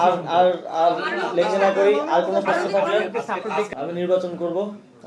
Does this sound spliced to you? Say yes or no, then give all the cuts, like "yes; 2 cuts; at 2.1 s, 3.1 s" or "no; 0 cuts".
yes; 1 cut; at 3.7 s